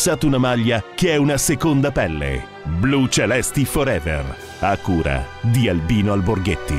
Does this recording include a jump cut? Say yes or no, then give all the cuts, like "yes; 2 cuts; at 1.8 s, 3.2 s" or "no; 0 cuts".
no; 0 cuts